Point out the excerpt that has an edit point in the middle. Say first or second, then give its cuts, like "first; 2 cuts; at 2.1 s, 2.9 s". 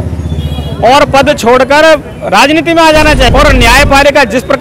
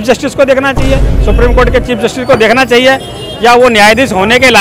first; 1 cut; at 3.3 s